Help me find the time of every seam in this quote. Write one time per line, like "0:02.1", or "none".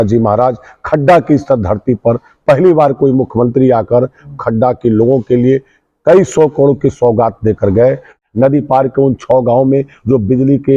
0:08.2